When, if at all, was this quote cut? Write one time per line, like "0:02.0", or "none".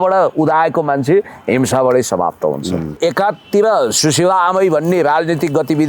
0:03.0